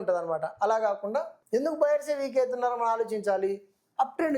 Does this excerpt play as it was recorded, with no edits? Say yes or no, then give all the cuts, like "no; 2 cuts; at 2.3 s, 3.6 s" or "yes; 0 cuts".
no; 1 cut; at 1.4 s